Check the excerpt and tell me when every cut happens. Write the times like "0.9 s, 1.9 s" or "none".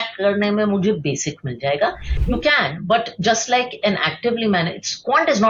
2.1 s